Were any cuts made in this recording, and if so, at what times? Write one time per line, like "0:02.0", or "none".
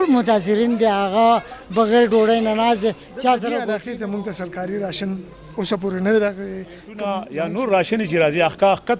0:03.8
0:06.9